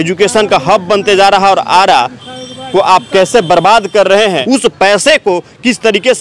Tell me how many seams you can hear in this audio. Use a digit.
1